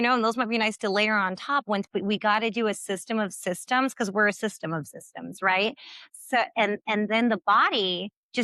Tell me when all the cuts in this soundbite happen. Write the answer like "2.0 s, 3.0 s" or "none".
none